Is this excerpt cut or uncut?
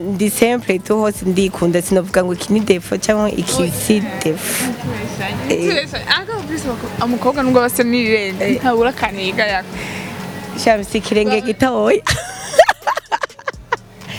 uncut